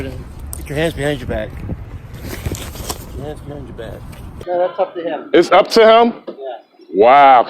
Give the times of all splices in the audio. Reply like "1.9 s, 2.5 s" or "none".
4.3 s